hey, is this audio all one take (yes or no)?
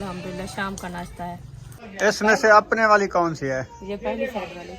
no